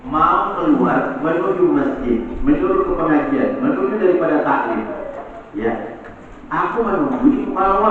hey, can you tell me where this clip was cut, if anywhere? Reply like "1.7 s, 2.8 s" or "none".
none